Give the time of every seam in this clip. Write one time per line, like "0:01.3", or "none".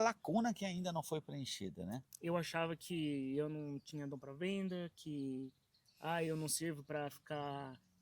0:02.1